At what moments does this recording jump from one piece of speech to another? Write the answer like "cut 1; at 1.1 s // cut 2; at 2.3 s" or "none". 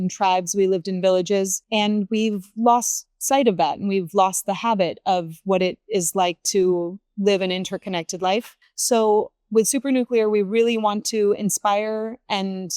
cut 1; at 1.6 s

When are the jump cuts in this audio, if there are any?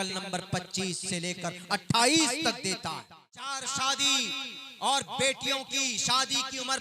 cut 1; at 3.5 s

